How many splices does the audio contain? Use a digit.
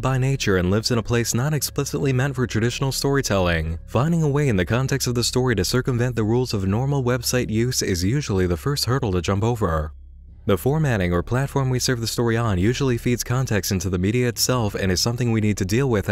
1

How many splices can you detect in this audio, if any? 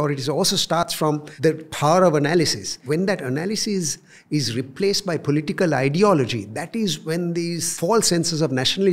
2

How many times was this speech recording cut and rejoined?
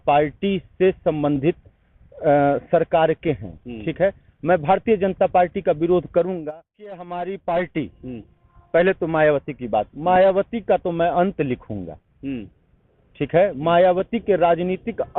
1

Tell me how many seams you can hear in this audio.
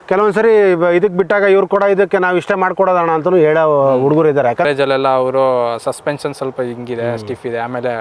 1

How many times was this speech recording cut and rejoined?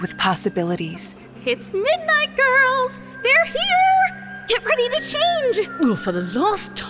0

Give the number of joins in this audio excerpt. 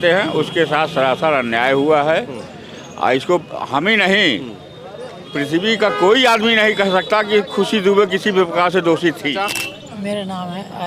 1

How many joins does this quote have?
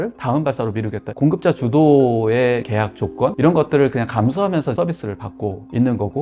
2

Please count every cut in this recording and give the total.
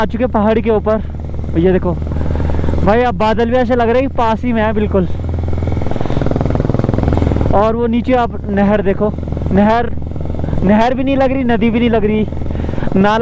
0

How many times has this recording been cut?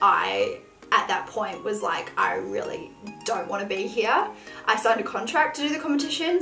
0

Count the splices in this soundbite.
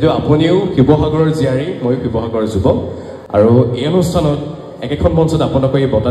0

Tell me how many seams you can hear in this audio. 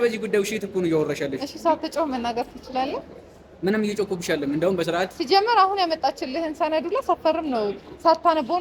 0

